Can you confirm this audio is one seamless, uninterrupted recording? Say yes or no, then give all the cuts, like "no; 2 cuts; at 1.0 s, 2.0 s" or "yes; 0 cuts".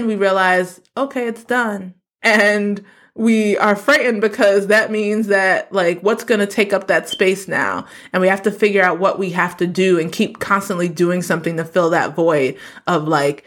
yes; 0 cuts